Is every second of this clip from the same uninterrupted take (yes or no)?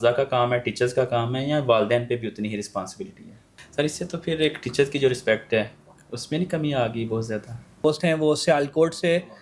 no